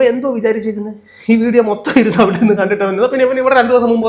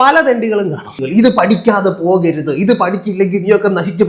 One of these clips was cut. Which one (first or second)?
second